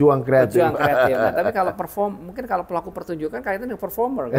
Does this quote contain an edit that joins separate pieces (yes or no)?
no